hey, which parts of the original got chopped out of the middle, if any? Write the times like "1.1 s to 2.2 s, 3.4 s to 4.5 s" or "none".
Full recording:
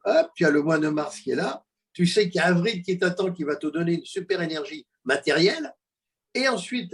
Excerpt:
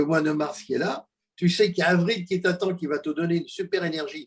none